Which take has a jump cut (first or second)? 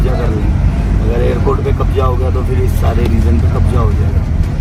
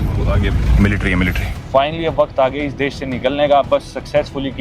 second